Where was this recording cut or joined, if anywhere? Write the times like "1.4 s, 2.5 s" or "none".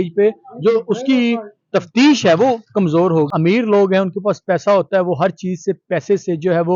3.3 s